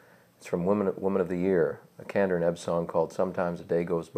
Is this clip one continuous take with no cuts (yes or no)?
no